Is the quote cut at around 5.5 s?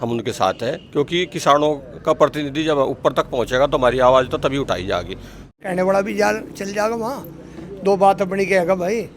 yes; 1 cut; at 5.5 s

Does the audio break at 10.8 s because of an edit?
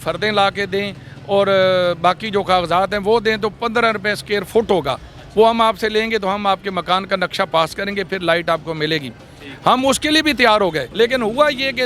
yes; 1 cut; at 10.8 s

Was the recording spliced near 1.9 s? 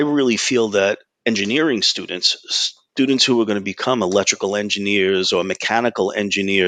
no; 0 cuts

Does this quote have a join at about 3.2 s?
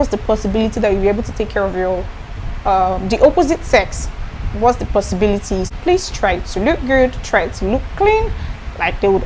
no; 1 cut; at 5.7 s

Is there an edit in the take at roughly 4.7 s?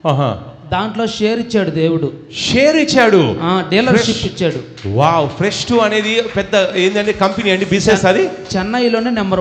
no; 0 cuts

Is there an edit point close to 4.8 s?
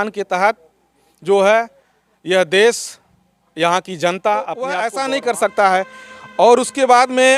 yes; 1 cut; at 4.8 s

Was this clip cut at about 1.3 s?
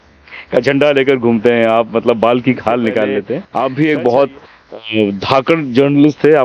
no; 1 cut; at 3.4 s

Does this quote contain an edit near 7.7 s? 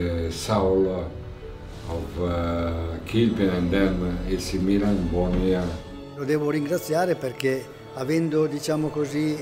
no; 1 cut; at 6.2 s

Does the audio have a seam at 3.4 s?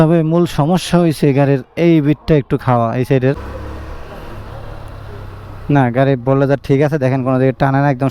yes; 1 cut; at 3.4 s

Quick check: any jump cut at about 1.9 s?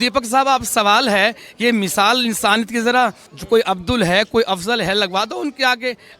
no; 1 cut; at 3.3 s

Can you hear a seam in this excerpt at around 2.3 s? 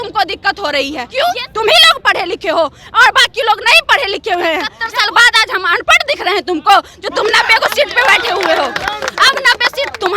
no; 2 cuts; at 1.0 s, 4.8 s

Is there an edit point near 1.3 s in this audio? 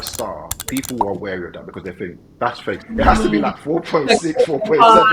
no; 1 cut; at 2.6 s

